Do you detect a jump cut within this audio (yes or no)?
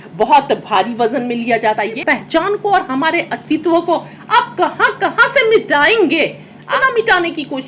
yes